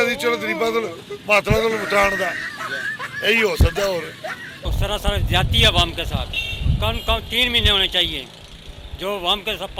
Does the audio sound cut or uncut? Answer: uncut